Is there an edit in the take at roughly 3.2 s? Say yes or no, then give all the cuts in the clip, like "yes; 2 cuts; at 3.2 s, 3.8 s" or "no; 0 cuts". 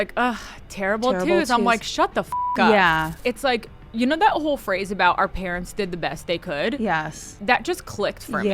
yes; 2 cuts; at 3.2 s, 7.4 s